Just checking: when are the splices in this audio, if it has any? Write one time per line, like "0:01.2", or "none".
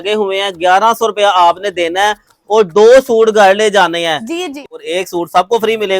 0:04.7